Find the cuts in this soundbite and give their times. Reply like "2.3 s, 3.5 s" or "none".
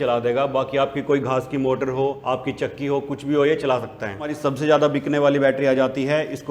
2.2 s, 4.3 s